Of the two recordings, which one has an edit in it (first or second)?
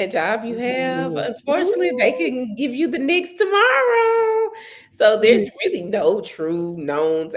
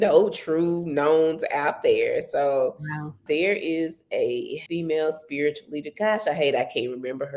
second